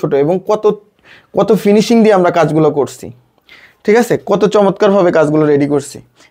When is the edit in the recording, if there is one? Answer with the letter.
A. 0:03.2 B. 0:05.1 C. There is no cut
C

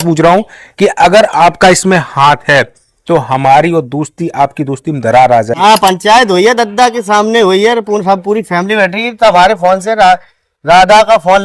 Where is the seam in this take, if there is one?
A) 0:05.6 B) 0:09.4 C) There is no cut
A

